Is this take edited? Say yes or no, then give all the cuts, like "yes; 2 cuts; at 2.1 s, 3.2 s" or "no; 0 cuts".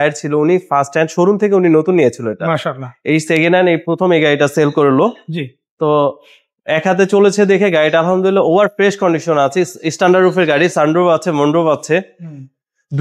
no; 0 cuts